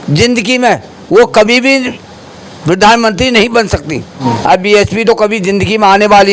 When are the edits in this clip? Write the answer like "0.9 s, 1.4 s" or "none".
4.2 s